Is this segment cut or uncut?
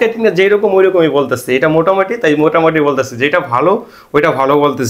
uncut